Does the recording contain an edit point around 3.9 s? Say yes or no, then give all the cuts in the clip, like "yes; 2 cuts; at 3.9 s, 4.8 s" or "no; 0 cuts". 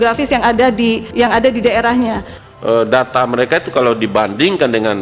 no; 2 cuts; at 1.1 s, 2.3 s